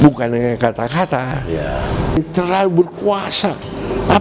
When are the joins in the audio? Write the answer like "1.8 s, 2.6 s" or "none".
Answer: 2.2 s